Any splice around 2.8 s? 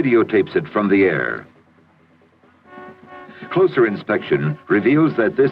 yes; 1 cut; at 2.8 s

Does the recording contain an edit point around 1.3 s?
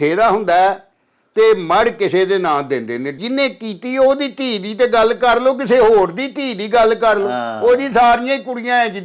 no; 1 cut; at 3.1 s

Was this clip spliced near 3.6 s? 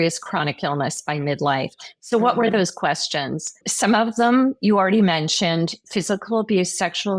yes; 1 cut; at 3.6 s

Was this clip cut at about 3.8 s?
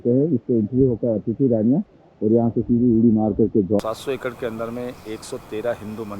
yes; 1 cut; at 3.8 s

